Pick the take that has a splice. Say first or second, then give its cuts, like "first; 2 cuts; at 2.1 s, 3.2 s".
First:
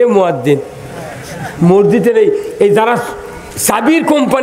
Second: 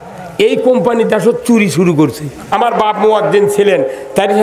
second; 1 cut; at 2.4 s